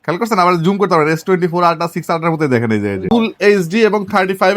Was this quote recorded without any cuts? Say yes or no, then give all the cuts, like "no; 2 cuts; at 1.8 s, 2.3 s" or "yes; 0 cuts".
no; 1 cut; at 3.0 s